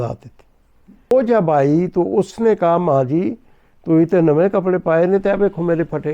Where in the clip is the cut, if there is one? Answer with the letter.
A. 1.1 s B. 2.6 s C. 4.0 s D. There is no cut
A